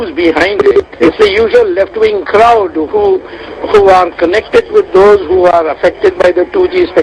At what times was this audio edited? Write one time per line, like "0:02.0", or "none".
none